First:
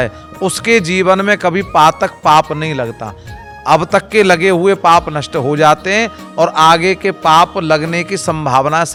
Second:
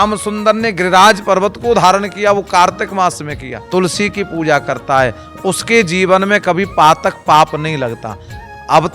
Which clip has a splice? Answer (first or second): second